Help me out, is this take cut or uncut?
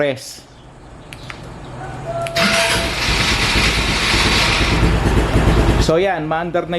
cut